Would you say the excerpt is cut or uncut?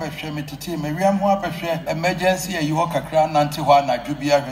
cut